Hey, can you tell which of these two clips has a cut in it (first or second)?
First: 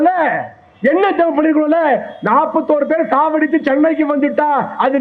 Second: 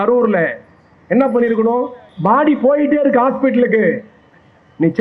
second